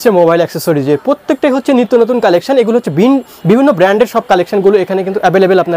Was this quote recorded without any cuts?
yes; 0 cuts

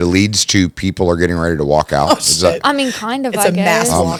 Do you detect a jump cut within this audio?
no; 0 cuts

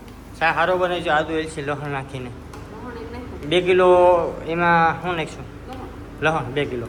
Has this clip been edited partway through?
no; 0 cuts

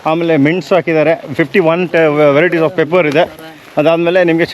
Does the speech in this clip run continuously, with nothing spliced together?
yes; 0 cuts

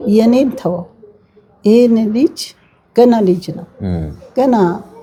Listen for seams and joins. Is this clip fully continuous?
yes; 0 cuts

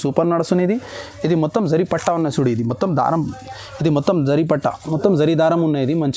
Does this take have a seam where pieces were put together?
no; 0 cuts

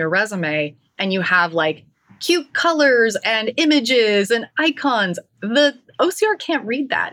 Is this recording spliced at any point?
no; 0 cuts

